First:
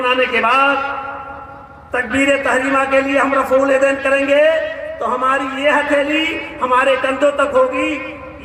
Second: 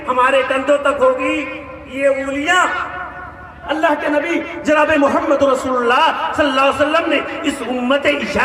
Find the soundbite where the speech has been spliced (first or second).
second